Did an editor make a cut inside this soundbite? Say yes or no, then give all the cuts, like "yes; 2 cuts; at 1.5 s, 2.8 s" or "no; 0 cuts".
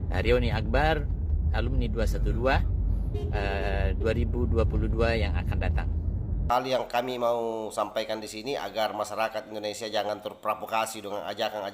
yes; 1 cut; at 6.4 s